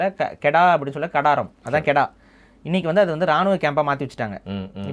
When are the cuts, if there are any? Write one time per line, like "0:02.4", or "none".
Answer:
none